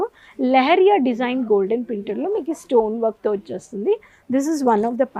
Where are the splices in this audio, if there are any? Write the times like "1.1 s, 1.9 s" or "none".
none